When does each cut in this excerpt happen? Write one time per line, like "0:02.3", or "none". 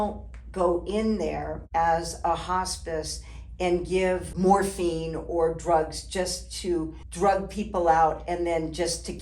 0:01.6
0:04.3
0:07.0